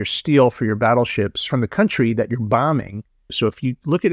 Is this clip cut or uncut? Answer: cut